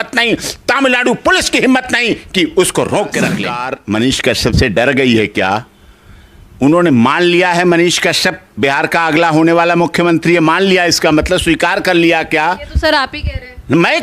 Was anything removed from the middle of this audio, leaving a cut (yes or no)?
yes